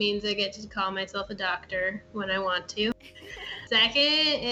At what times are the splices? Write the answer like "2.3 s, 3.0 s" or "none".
3.6 s